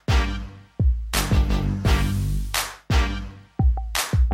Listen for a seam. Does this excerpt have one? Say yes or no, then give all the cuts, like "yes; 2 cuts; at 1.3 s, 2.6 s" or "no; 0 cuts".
no; 0 cuts